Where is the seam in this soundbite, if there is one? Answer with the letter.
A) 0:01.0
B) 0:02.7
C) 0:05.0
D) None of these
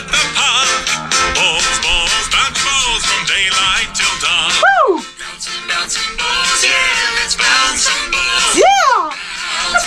D